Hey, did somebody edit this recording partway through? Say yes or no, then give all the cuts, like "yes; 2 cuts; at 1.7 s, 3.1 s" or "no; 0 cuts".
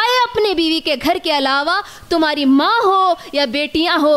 no; 0 cuts